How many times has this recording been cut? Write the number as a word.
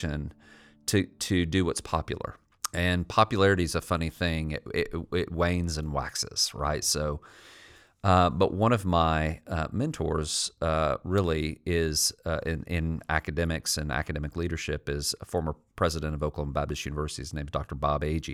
one